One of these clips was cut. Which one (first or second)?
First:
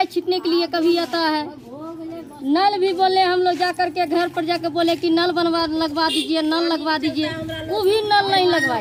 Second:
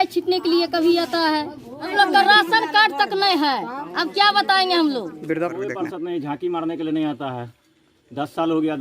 second